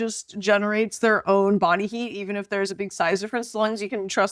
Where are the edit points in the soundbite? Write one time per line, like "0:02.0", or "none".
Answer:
none